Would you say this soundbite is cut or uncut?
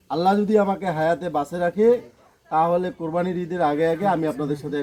uncut